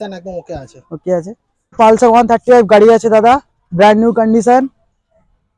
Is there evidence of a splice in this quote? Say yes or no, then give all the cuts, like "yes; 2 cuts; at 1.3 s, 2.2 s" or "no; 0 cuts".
yes; 1 cut; at 1.8 s